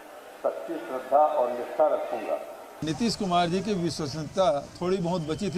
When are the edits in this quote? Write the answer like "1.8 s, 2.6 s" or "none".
2.8 s